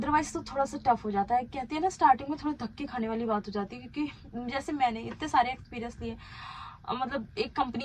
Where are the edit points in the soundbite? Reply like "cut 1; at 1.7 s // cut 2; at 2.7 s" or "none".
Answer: none